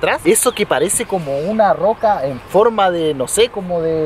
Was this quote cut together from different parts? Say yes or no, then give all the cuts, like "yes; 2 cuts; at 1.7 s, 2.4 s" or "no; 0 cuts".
no; 0 cuts